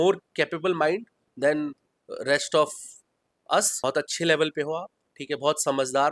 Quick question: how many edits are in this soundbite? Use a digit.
1